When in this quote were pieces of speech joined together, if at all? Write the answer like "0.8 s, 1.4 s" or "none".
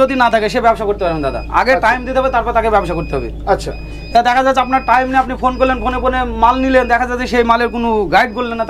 none